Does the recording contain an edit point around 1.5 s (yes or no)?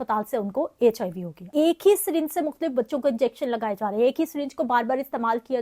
yes